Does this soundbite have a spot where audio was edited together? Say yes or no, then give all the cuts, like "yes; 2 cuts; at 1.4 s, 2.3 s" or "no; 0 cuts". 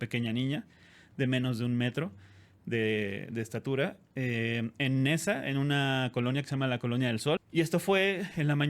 yes; 1 cut; at 7.4 s